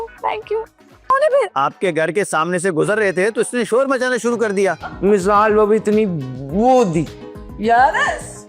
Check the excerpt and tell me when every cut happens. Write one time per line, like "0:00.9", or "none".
0:01.1
0:04.8

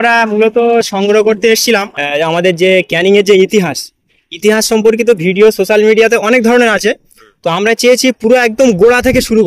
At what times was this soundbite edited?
0:01.9

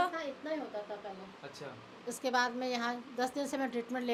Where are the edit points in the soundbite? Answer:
none

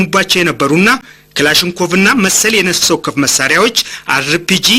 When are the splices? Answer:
0:01.1

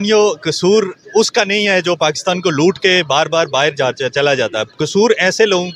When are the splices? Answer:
none

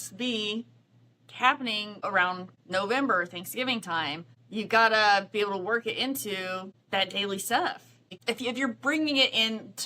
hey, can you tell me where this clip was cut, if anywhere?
0:02.1
0:04.3
0:06.7
0:08.2

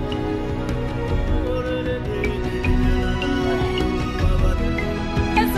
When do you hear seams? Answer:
0:02.1

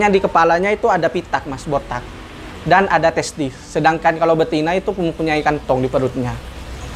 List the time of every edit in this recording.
none

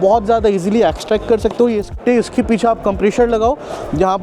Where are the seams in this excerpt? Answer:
0:01.9

